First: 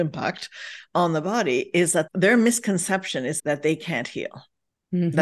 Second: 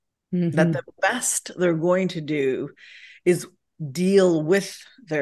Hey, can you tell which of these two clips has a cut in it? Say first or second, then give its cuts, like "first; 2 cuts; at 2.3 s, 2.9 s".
first; 2 cuts; at 2.1 s, 3.4 s